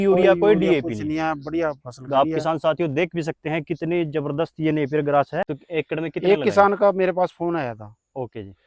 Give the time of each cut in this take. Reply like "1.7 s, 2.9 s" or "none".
5.6 s